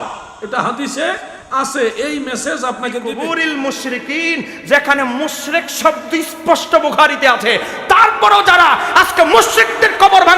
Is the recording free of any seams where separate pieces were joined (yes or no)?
no